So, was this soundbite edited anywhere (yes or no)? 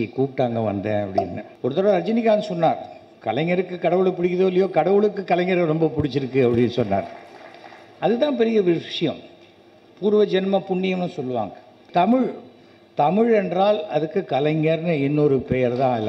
yes